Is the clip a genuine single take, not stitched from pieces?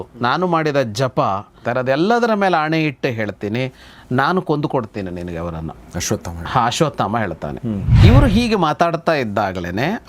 no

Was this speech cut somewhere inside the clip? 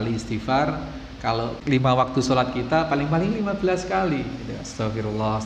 yes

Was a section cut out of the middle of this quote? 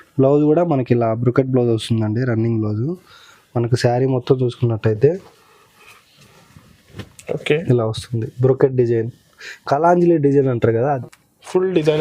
yes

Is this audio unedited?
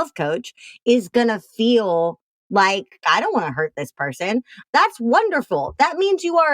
no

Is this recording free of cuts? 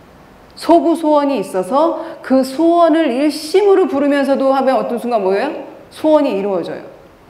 yes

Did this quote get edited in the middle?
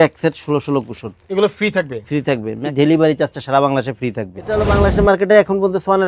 yes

